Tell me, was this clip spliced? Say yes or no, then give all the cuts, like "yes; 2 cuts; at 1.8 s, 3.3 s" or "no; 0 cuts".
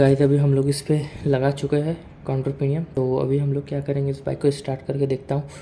yes; 1 cut; at 2.9 s